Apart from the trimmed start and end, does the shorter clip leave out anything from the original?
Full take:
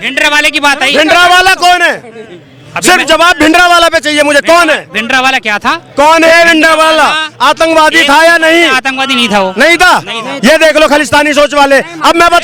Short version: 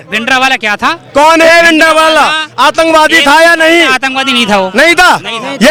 no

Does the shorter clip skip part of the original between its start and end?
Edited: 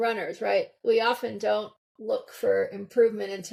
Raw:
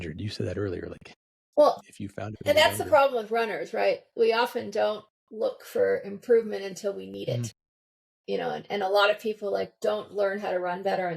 no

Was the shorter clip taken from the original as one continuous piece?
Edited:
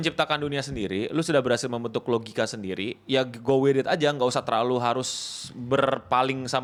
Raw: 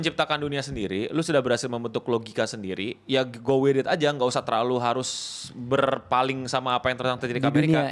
yes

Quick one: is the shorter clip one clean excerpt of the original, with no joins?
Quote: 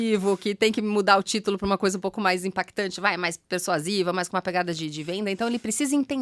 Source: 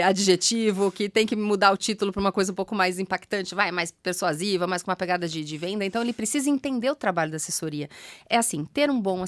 yes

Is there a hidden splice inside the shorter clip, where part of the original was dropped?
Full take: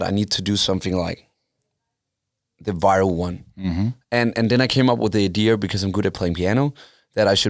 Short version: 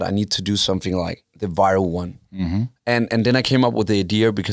yes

